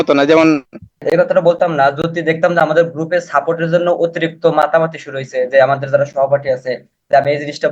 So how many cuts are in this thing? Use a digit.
1